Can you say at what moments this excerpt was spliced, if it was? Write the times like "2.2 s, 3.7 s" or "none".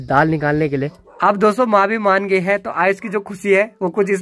0.9 s